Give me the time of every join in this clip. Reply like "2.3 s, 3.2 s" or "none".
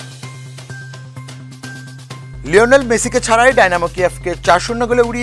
none